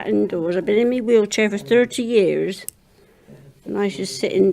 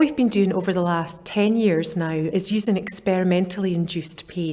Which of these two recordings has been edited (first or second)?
second